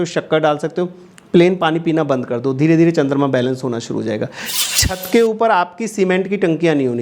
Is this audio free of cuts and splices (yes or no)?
no